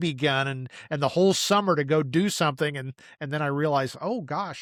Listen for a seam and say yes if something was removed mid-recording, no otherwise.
no